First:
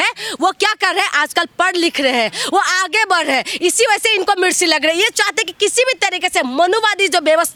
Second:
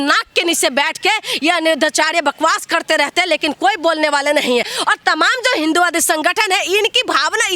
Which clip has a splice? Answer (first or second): second